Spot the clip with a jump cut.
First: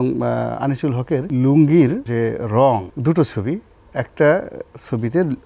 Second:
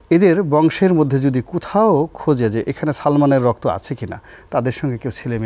first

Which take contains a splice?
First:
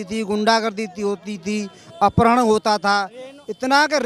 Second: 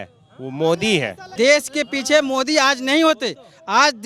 second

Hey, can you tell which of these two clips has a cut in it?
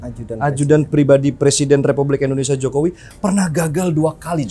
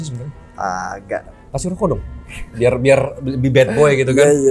second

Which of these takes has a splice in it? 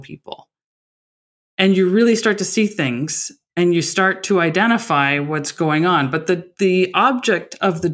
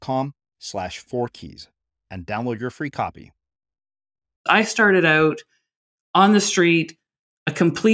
second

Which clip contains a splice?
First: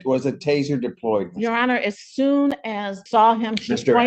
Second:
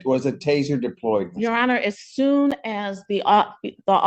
first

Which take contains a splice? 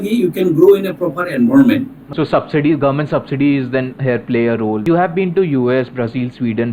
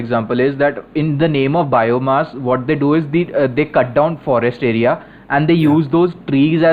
first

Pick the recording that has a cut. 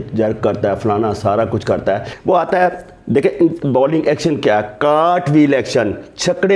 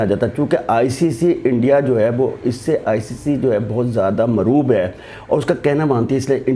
first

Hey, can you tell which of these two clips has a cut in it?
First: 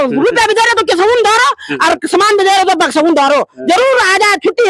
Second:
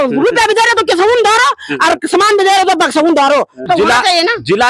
second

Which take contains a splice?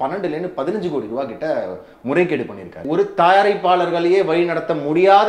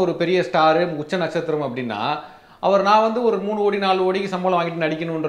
first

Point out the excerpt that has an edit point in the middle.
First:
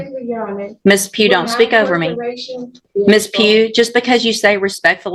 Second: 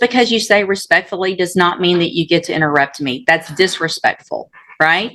first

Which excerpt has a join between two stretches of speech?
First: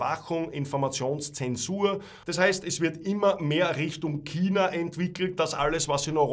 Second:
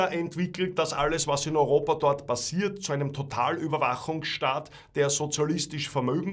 first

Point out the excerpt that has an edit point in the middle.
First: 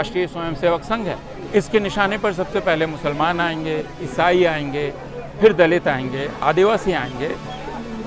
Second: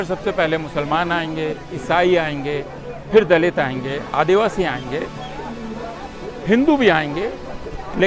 first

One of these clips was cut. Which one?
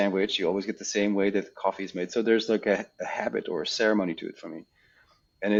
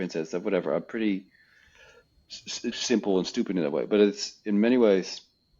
second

